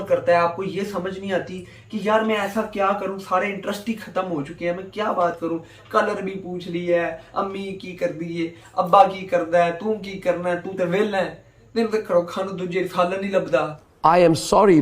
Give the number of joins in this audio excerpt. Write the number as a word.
zero